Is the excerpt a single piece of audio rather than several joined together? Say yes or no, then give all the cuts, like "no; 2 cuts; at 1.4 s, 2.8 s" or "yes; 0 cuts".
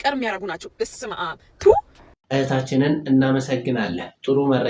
yes; 0 cuts